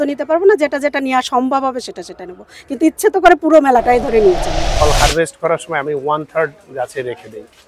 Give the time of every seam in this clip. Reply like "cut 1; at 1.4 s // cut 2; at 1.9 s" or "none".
cut 1; at 4.6 s